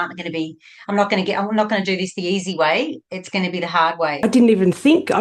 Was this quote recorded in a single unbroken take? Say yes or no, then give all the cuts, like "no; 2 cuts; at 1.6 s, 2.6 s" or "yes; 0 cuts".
no; 1 cut; at 4.2 s